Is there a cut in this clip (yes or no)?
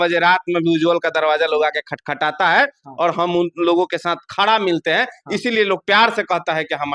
no